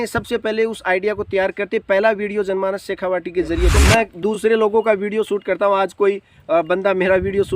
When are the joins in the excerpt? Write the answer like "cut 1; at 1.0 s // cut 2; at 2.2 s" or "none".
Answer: cut 1; at 3.8 s